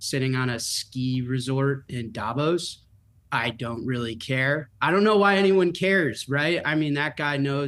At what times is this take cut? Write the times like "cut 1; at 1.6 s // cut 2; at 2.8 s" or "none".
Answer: cut 1; at 4.7 s

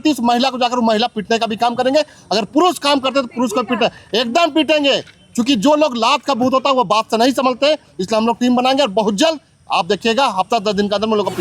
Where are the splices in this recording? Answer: none

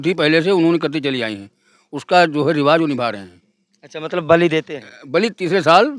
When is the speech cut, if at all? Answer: none

